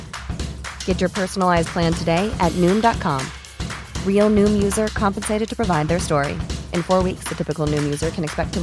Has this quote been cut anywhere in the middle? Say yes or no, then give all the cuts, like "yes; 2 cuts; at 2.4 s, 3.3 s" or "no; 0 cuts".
no; 0 cuts